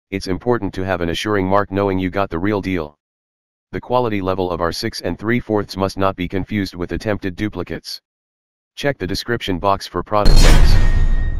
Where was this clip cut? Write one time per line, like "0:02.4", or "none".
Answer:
0:10.2